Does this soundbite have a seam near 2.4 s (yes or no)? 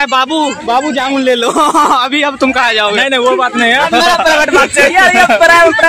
no